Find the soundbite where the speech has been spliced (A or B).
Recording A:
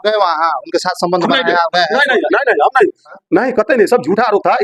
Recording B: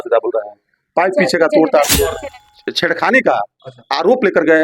B